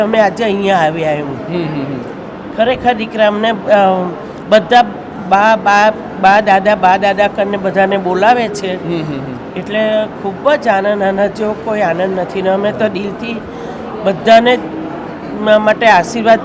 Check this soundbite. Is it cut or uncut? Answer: uncut